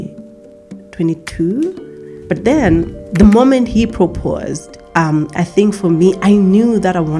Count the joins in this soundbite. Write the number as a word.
two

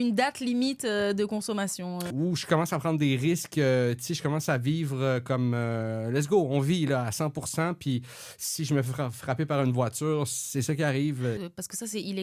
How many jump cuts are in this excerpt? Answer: two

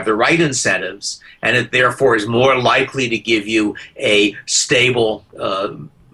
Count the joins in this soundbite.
zero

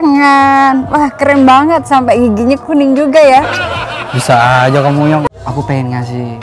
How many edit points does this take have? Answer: one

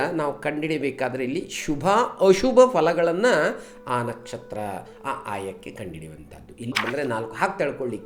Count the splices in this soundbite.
one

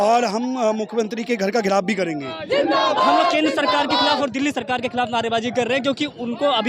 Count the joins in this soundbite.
one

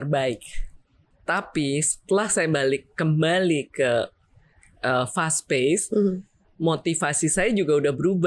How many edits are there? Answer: one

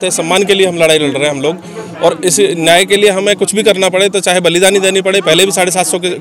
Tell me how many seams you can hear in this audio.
zero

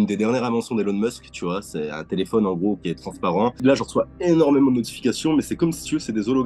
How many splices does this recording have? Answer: one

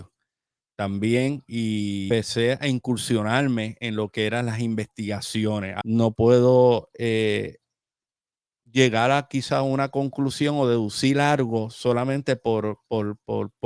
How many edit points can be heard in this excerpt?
two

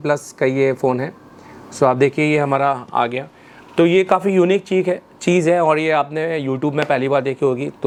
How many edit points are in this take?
zero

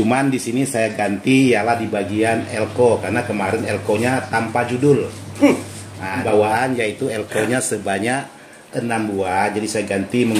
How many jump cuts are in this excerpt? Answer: one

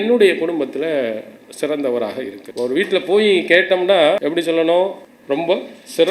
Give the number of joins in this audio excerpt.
three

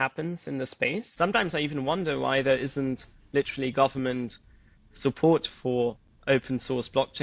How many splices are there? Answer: one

